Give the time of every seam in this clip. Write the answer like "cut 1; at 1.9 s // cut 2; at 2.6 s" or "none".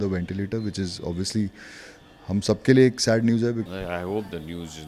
cut 1; at 3.6 s